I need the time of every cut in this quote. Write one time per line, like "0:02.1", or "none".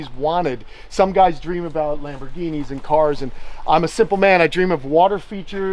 none